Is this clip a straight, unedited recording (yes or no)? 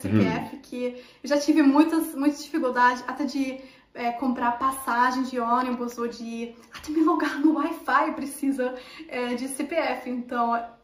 yes